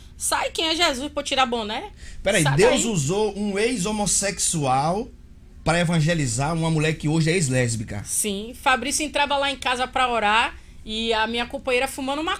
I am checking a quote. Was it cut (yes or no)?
no